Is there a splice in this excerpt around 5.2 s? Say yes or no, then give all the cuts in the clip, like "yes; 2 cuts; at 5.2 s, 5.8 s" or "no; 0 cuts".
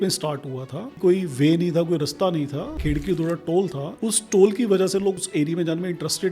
yes; 4 cuts; at 1.0 s, 2.8 s, 3.9 s, 5.2 s